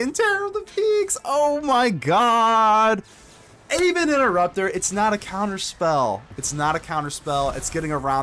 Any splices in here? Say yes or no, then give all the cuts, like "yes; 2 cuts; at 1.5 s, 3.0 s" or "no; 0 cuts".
no; 0 cuts